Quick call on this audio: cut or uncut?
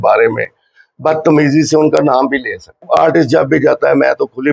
cut